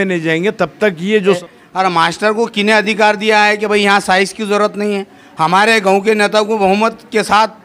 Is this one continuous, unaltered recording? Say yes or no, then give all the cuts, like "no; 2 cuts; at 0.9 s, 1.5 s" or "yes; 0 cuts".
no; 1 cut; at 1.4 s